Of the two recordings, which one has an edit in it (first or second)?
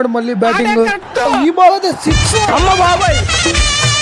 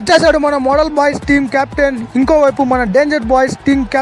first